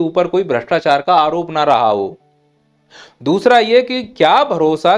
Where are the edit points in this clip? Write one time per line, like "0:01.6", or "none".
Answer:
none